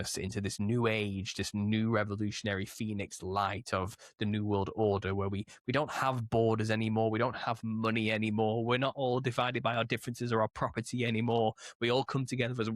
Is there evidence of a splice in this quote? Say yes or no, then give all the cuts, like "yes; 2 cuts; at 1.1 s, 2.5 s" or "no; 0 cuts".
no; 0 cuts